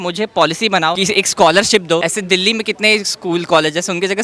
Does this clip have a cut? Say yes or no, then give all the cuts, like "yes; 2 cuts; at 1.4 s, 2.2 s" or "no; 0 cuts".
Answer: yes; 2 cuts; at 1.0 s, 2.0 s